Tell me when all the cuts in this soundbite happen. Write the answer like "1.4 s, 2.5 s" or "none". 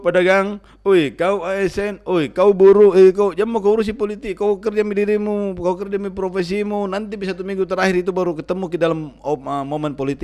none